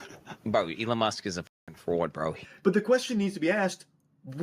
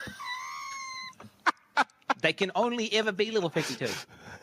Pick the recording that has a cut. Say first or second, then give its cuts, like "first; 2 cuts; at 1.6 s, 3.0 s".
first; 1 cut; at 2.5 s